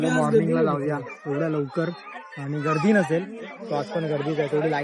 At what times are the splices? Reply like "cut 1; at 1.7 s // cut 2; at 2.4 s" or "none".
none